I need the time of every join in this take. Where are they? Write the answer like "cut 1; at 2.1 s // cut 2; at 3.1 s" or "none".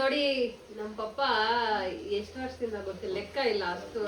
none